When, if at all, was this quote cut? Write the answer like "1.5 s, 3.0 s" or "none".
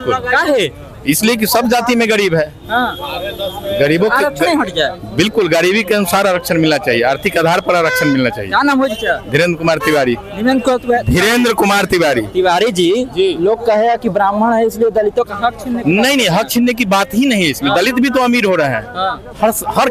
none